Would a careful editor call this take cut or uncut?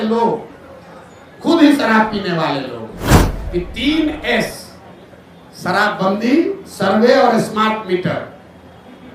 cut